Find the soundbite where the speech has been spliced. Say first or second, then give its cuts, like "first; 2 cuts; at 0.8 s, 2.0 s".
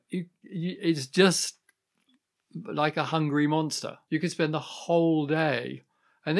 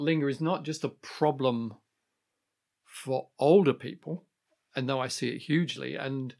first; 1 cut; at 3.9 s